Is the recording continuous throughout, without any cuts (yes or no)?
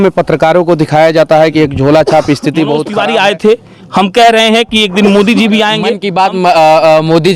no